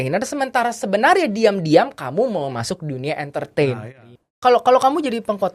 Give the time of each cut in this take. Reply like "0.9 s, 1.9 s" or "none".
3.9 s